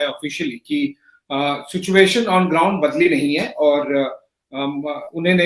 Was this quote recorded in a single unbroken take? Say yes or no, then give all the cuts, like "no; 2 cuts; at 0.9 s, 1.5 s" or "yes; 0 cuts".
yes; 0 cuts